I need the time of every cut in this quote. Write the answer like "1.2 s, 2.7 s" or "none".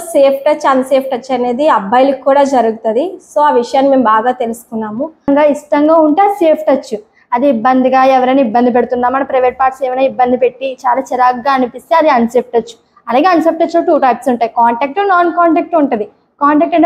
5.3 s